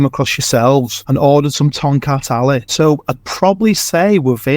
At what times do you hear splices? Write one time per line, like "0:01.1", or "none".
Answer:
0:01.0
0:02.7